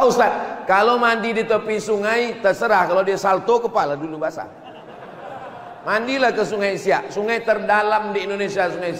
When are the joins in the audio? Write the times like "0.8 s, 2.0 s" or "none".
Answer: none